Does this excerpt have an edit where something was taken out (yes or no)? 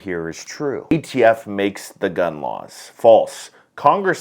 yes